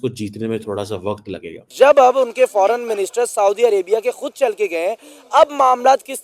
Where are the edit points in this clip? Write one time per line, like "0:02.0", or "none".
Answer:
0:01.7